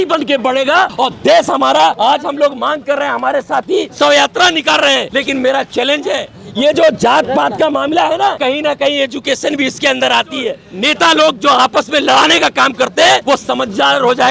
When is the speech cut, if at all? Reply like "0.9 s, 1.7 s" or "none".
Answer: 0.9 s, 2.0 s, 3.9 s, 5.1 s, 6.4 s, 8.4 s, 10.7 s, 13.2 s